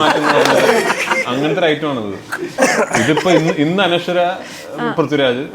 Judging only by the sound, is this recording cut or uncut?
uncut